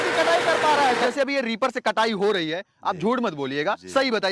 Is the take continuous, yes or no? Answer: no